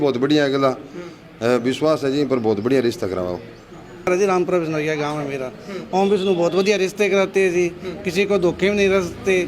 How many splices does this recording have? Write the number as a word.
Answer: one